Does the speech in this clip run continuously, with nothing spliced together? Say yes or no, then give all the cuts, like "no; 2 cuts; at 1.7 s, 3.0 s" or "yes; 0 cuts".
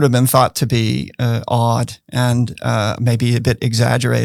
yes; 0 cuts